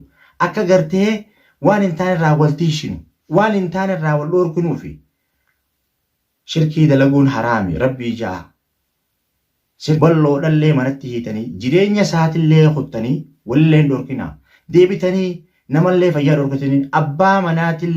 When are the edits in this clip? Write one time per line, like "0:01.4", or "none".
0:10.0